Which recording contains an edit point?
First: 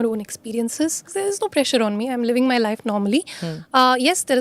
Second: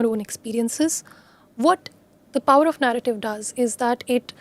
first; 1 cut; at 1.0 s

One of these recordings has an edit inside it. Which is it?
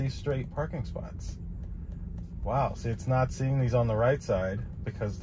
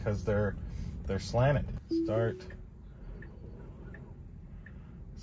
second; 1 cut; at 1.8 s

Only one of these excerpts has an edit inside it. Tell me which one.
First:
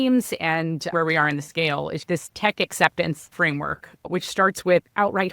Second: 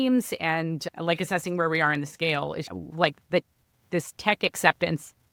first; 3 cuts; at 0.9 s, 2.0 s, 3.3 s

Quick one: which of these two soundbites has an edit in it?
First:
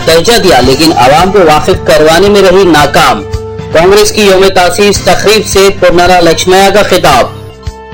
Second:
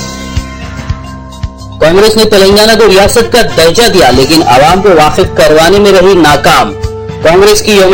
second; 1 cut; at 1.6 s

